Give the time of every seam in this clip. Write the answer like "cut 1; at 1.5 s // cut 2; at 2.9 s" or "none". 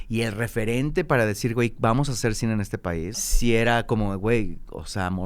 cut 1; at 3.2 s